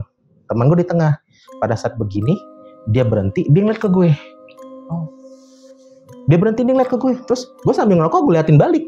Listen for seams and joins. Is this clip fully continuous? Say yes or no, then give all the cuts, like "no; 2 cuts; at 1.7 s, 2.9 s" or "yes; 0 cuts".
yes; 0 cuts